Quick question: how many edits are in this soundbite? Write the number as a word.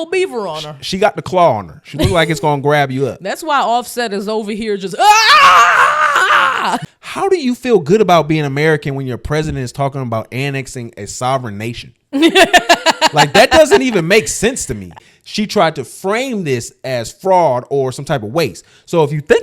two